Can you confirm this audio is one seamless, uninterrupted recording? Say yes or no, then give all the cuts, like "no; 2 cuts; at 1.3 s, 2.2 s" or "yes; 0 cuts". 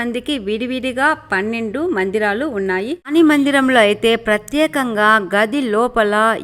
no; 1 cut; at 3.1 s